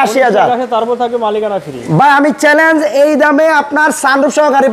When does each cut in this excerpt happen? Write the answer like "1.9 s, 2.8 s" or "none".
none